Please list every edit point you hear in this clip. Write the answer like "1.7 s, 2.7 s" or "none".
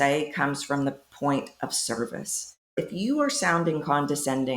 2.7 s